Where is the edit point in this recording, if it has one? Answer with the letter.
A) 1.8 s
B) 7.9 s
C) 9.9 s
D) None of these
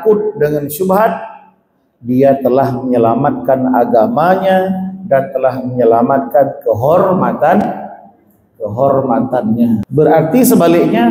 C